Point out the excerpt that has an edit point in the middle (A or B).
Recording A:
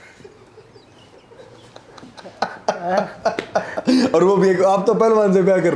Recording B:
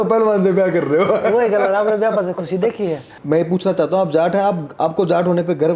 B